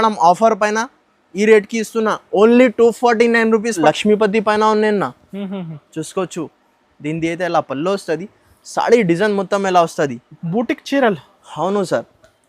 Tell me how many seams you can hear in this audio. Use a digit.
1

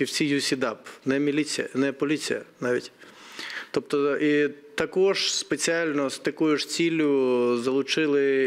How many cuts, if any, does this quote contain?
0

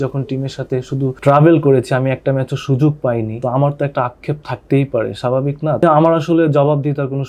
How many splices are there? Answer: 3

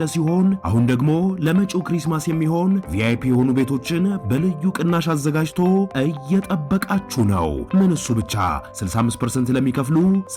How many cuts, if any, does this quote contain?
0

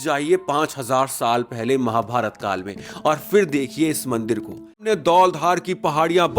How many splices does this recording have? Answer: 1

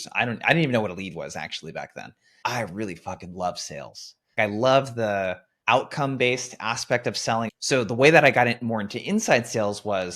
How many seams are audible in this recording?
2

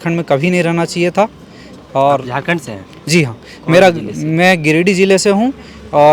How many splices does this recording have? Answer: 0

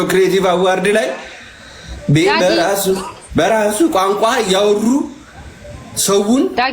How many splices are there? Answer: 0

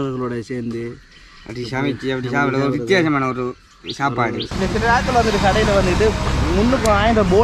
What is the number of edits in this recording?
1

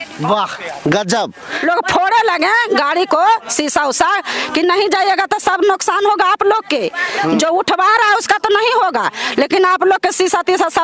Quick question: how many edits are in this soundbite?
1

